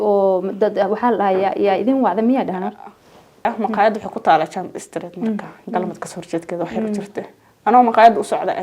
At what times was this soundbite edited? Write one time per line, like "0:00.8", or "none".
0:03.0